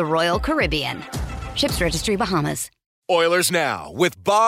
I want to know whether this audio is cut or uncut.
cut